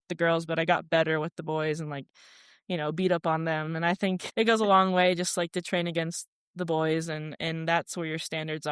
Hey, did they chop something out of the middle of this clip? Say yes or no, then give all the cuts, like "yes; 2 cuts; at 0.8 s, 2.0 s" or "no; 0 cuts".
no; 0 cuts